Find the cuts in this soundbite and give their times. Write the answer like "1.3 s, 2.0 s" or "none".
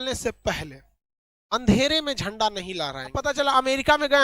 3.2 s